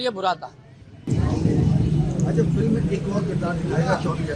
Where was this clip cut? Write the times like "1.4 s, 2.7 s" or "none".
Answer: none